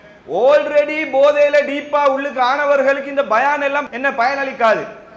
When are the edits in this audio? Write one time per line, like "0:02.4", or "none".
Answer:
0:03.8